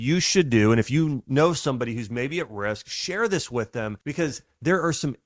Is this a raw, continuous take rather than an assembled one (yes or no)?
no